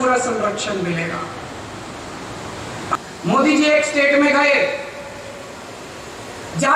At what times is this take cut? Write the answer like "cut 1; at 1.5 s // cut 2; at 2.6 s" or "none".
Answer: cut 1; at 2.9 s